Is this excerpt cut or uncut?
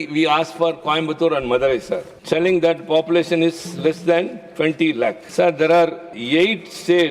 cut